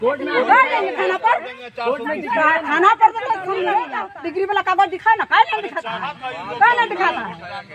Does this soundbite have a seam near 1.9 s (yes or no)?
no